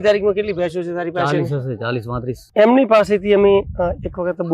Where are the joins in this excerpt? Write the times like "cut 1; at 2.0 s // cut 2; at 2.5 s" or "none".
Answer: cut 1; at 2.4 s